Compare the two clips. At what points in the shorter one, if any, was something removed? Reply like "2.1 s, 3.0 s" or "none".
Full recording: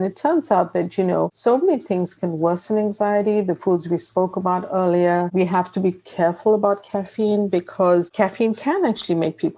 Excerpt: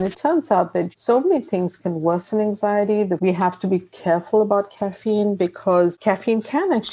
0.9 s, 3.2 s